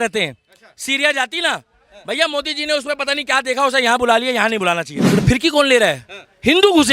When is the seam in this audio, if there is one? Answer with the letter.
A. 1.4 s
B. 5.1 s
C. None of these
B